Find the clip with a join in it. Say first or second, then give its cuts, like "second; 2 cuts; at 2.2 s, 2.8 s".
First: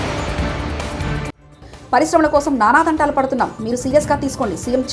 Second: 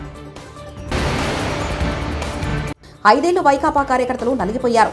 second; 2 cuts; at 0.9 s, 2.8 s